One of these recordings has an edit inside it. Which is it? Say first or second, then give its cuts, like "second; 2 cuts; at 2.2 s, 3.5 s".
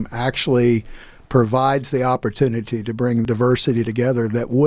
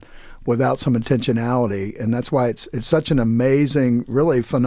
first; 1 cut; at 3.2 s